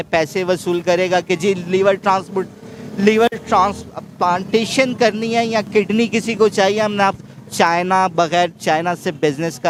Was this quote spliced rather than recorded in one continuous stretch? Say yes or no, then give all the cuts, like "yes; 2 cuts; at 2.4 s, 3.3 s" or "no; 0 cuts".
no; 0 cuts